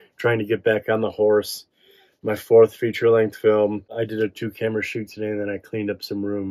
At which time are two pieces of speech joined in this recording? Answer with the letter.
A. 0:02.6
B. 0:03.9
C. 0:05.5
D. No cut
B